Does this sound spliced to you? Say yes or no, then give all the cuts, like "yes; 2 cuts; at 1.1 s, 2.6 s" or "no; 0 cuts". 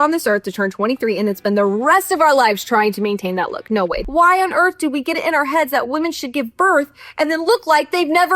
yes; 1 cut; at 4.0 s